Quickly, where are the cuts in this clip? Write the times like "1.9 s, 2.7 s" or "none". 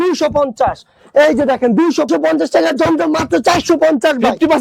2.1 s